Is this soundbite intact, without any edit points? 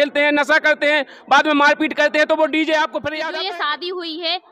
no; 1 cut; at 3.2 s

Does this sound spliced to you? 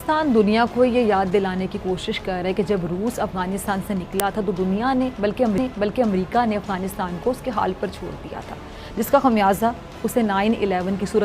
no; 0 cuts

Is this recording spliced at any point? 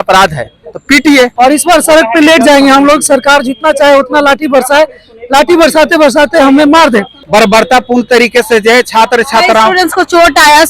yes; 2 cuts; at 1.3 s, 7.1 s

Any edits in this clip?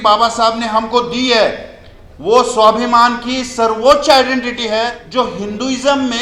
yes; 1 cut; at 5.0 s

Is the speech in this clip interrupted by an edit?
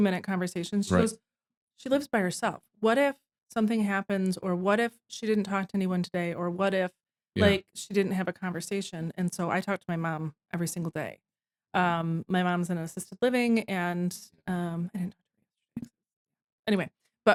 no; 0 cuts

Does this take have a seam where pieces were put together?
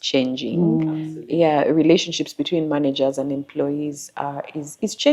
no; 0 cuts

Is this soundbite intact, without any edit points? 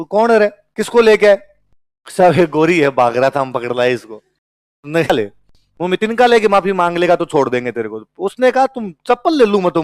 no; 1 cut; at 5.1 s

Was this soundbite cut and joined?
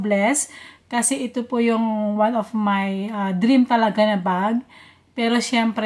no; 0 cuts

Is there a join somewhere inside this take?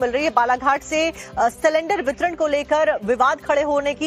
no; 0 cuts

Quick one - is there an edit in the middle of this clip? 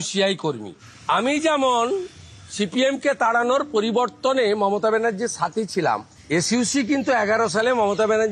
no; 0 cuts

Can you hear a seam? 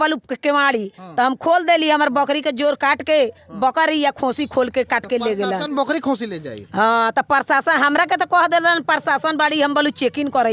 no; 0 cuts

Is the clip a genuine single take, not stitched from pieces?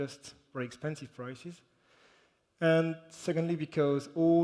no; 1 cut; at 3.3 s

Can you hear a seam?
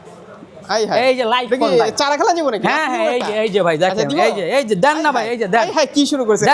no; 0 cuts

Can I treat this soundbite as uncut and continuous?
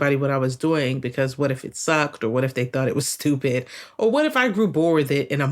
yes; 0 cuts

